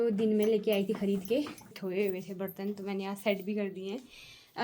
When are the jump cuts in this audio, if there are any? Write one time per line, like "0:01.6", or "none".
0:01.8